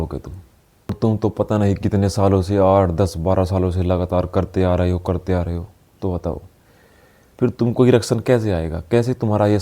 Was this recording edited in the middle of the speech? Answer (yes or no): yes